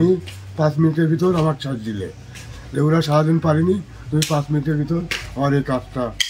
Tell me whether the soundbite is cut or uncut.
uncut